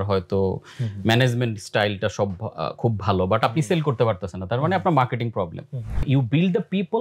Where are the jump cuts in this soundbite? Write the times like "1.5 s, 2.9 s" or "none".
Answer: 6.0 s

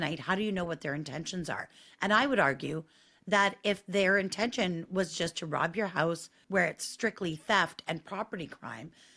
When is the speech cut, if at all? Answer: 6.3 s

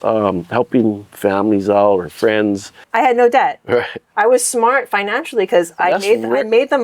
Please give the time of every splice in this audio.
2.7 s

